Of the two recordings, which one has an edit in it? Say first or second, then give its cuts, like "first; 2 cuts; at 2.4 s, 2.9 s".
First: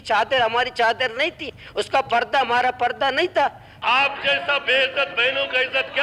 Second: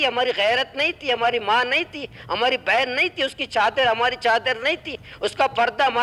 first; 1 cut; at 3.7 s